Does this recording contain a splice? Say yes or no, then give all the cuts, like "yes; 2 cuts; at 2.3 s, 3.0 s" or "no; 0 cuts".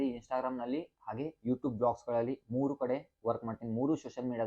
no; 0 cuts